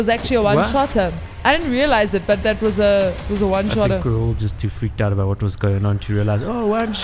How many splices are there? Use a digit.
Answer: 0